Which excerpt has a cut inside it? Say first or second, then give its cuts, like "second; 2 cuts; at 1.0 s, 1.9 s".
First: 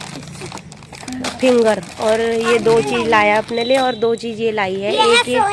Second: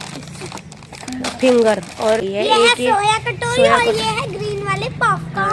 second; 1 cut; at 2.2 s